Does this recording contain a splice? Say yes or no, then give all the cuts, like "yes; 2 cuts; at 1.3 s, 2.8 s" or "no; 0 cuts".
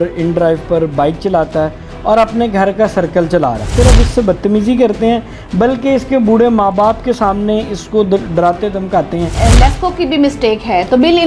yes; 2 cuts; at 3.7 s, 9.3 s